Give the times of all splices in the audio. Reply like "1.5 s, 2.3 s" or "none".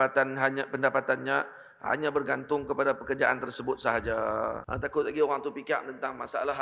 4.7 s